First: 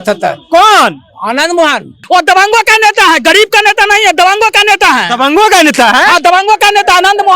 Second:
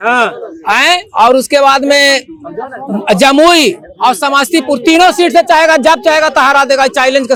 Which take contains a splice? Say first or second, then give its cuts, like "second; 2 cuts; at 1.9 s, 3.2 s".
first; 1 cut; at 2.0 s